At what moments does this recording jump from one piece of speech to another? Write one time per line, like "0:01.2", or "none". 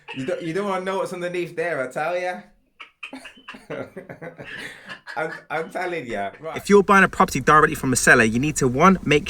0:06.5